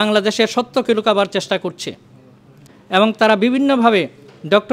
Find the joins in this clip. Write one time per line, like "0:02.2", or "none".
0:02.7